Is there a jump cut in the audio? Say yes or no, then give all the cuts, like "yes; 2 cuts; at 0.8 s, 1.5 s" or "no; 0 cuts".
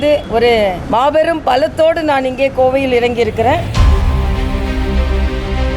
yes; 1 cut; at 3.7 s